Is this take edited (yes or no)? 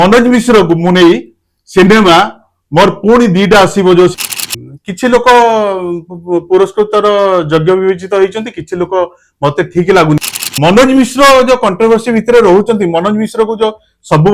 yes